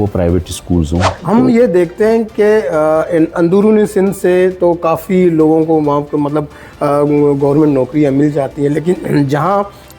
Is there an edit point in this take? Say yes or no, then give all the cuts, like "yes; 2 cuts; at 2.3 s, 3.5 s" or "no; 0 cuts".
yes; 1 cut; at 1.1 s